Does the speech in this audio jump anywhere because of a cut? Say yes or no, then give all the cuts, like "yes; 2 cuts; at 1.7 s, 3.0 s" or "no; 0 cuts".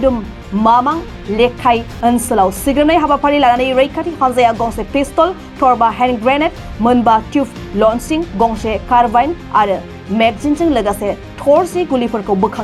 no; 0 cuts